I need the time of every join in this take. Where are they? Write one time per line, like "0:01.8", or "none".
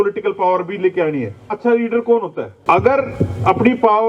0:01.5
0:02.5